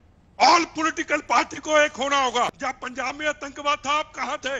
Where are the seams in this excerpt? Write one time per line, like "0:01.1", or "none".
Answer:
0:02.5